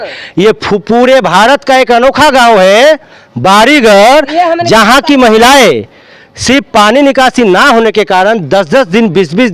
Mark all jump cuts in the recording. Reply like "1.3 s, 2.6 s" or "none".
none

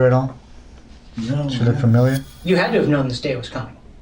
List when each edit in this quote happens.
2.3 s

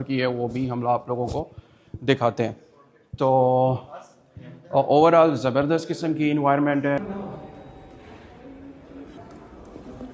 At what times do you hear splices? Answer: 7.0 s, 9.2 s

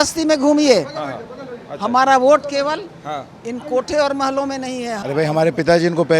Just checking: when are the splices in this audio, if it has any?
5.0 s

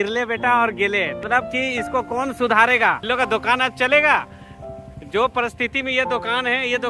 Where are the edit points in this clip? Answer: 1.2 s, 3.0 s

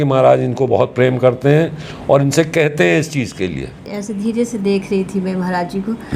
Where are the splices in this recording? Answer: 4.0 s

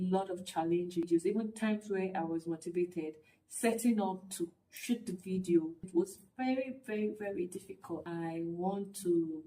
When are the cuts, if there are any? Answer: 1.1 s, 5.8 s, 8.0 s

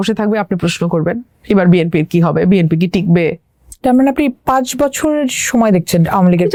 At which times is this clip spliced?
none

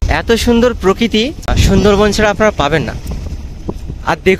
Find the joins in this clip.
1.5 s

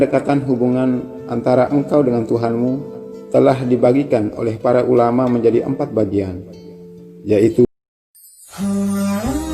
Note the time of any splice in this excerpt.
7.7 s

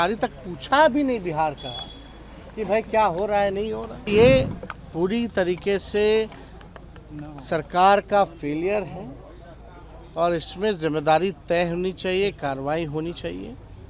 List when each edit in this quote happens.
4.1 s

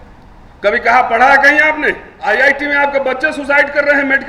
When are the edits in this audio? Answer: 2.1 s

